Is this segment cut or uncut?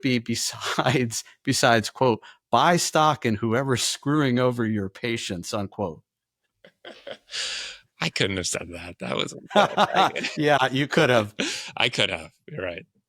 uncut